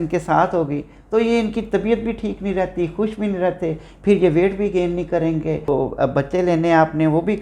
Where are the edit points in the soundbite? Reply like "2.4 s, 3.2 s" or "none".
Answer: 5.7 s